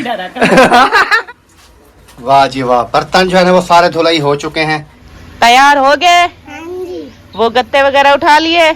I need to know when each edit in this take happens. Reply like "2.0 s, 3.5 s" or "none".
1.2 s, 5.0 s